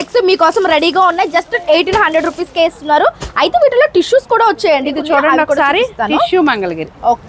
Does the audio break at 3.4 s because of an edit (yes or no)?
no